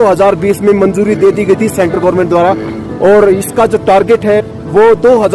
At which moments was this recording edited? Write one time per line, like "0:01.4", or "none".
none